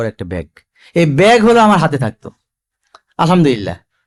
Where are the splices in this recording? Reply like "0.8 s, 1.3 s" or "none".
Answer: none